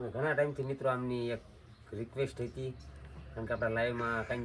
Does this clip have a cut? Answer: no; 0 cuts

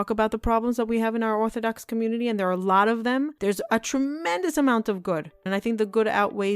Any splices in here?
yes; 2 cuts; at 3.3 s, 5.4 s

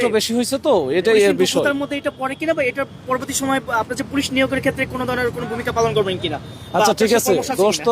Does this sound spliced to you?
no; 0 cuts

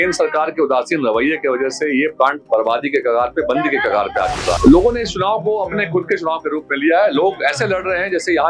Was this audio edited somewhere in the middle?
yes; 1 cut; at 4.6 s

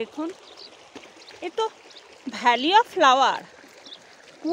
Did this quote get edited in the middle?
no; 0 cuts

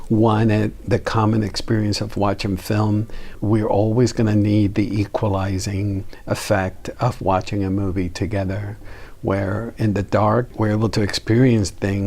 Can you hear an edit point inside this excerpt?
yes; 2 cuts; at 3.3 s, 10.5 s

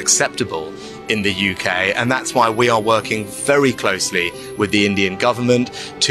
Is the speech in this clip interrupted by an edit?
no; 0 cuts

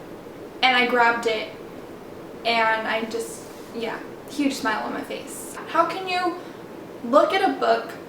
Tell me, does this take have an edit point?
yes; 1 cut; at 5.5 s

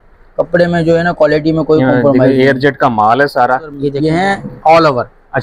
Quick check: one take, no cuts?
no; 1 cut; at 3.9 s

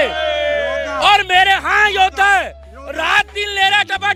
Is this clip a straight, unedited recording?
yes; 0 cuts

